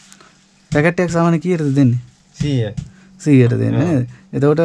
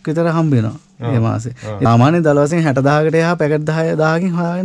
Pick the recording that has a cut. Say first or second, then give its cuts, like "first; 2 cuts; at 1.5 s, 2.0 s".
second; 1 cut; at 1.9 s